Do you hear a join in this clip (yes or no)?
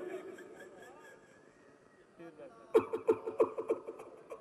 no